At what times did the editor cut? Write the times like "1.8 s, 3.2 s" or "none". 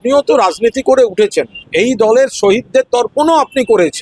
1.6 s